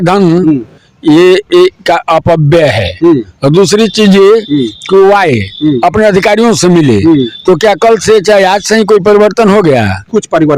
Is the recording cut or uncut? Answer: uncut